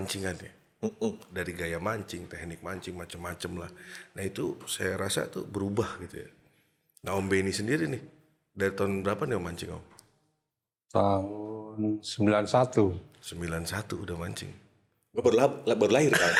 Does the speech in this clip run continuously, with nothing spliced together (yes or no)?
yes